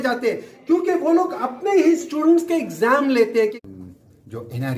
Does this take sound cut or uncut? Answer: cut